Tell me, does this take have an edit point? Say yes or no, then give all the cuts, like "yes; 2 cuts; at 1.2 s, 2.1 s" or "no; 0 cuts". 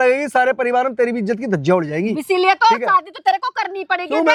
no; 0 cuts